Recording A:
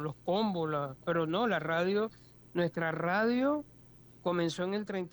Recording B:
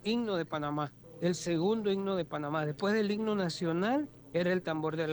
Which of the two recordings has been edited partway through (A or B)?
B